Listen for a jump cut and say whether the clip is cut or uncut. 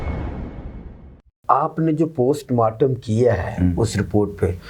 cut